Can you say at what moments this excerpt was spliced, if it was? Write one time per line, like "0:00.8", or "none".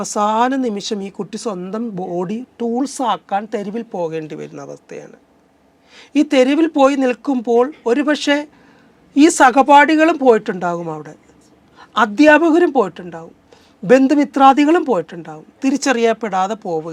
none